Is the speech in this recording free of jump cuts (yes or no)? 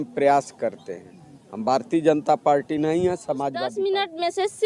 no